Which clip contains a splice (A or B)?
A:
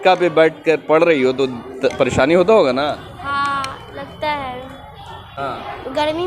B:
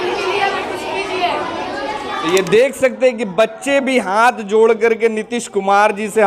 A